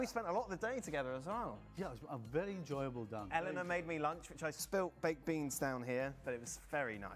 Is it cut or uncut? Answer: cut